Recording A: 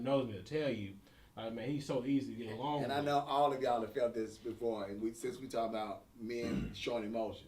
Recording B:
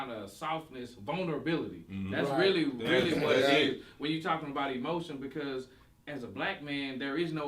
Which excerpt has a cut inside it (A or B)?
A